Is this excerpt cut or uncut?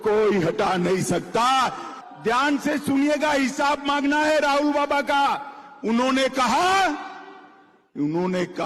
cut